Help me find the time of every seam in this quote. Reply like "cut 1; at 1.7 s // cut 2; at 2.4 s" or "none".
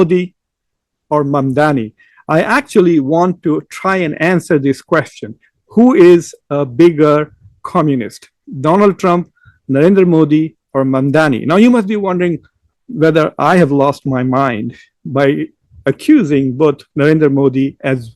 none